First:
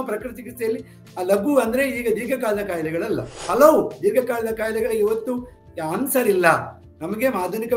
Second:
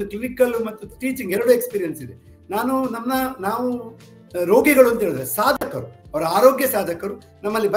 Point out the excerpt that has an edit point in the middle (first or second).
first